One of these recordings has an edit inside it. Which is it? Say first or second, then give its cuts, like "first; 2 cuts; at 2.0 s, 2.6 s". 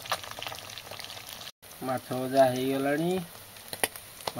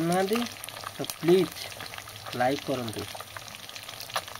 first; 1 cut; at 1.6 s